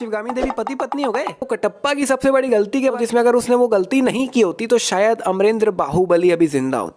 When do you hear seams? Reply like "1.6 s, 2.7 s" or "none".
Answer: 1.5 s, 3.0 s